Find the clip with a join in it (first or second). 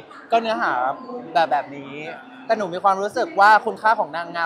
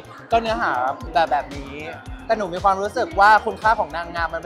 second